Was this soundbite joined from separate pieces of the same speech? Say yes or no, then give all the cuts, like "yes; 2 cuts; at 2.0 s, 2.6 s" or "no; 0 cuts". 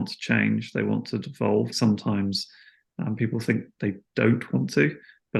yes; 1 cut; at 1.7 s